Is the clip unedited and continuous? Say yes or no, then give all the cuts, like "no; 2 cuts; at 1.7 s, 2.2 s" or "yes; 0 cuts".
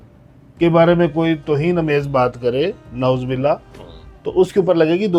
yes; 0 cuts